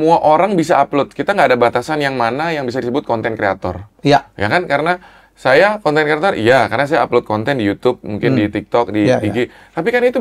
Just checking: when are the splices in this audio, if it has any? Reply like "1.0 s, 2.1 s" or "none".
none